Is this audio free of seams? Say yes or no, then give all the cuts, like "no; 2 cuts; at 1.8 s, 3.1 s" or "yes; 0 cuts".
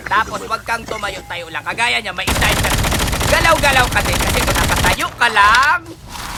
yes; 0 cuts